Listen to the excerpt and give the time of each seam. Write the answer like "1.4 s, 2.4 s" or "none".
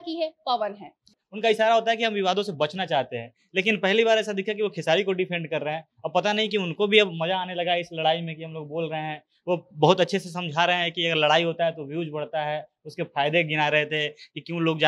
1.1 s